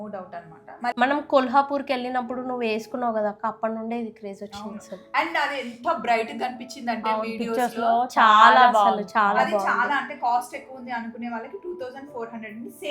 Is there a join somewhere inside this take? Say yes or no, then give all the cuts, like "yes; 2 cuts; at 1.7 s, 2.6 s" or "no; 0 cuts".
yes; 1 cut; at 0.9 s